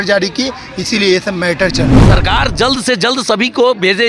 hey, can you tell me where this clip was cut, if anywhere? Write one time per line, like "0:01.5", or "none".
0:02.1